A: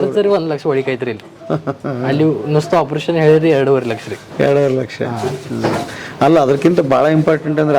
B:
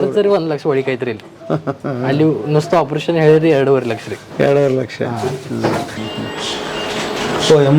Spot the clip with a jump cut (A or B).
B